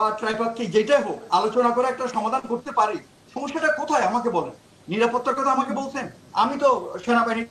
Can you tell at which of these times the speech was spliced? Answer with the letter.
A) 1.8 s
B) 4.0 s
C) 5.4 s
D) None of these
D